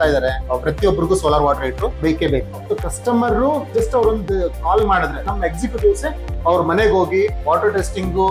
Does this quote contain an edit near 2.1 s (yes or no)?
yes